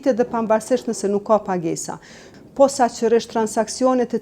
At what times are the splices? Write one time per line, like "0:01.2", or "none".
0:02.2